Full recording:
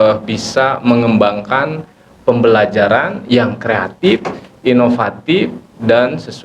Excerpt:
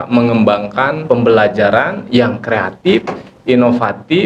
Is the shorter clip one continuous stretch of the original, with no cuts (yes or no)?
no